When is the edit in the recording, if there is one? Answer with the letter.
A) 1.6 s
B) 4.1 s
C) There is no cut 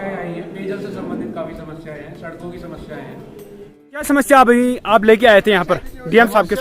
B